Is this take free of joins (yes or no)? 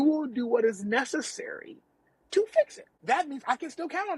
no